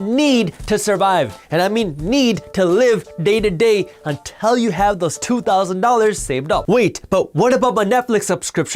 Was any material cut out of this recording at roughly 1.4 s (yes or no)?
no